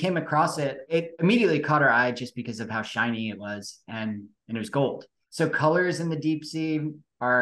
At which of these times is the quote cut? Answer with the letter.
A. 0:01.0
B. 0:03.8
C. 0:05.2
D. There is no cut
A